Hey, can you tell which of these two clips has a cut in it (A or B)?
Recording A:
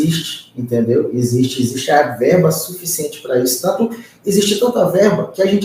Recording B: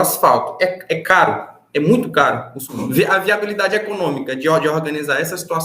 B